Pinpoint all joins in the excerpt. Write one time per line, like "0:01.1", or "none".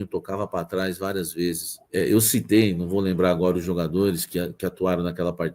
0:01.7